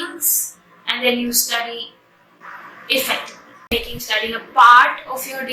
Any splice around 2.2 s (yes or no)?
no